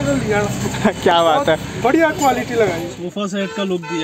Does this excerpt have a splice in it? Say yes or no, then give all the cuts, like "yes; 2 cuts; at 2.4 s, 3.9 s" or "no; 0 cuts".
yes; 1 cut; at 3.0 s